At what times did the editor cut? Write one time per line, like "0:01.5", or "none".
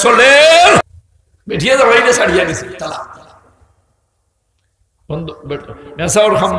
0:01.0